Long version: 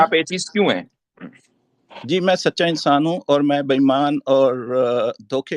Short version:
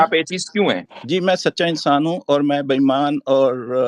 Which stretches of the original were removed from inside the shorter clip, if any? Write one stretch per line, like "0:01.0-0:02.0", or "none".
0:00.9-0:01.9